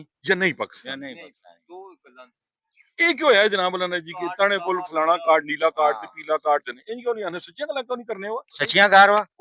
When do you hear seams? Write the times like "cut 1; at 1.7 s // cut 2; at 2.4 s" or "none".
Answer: cut 1; at 6.7 s